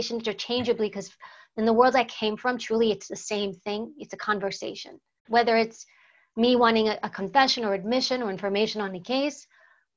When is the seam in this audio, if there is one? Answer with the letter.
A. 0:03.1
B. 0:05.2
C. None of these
B